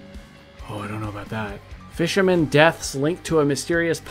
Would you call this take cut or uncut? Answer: cut